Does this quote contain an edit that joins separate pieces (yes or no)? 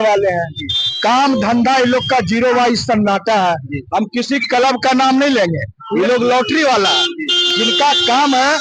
no